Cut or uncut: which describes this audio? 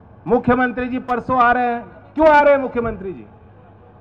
uncut